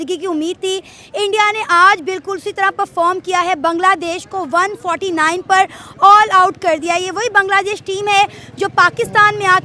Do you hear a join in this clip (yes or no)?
no